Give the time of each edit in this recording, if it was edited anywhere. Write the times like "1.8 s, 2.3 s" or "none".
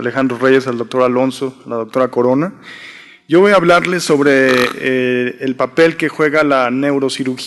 none